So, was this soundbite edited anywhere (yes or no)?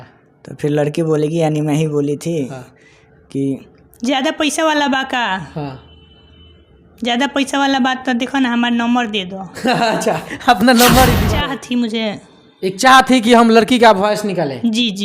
yes